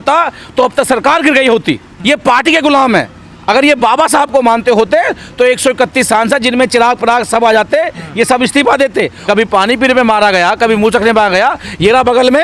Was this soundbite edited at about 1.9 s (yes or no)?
yes